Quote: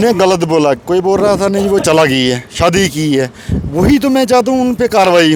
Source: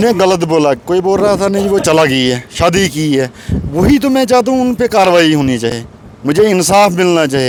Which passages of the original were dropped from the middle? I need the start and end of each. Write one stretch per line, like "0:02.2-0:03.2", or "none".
none